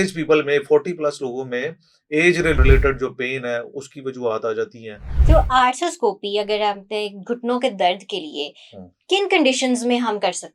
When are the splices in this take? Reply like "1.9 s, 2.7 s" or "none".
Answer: 5.1 s